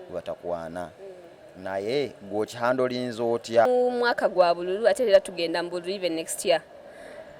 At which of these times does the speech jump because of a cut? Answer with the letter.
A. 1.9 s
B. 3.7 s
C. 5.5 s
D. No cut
B